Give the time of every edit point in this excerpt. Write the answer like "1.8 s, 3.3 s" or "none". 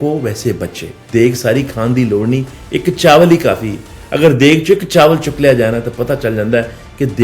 1.0 s